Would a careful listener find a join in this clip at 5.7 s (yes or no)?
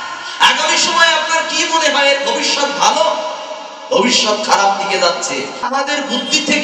yes